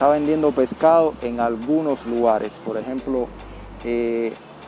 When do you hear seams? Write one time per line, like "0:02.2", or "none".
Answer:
none